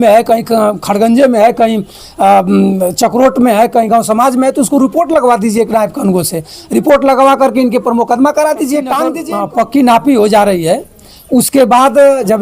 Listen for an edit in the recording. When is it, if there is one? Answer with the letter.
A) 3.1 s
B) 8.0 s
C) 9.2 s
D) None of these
C